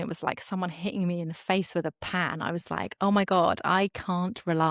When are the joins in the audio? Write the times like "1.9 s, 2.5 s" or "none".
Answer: none